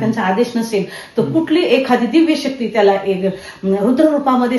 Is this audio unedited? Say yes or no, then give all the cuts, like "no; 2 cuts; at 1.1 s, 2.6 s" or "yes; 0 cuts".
yes; 0 cuts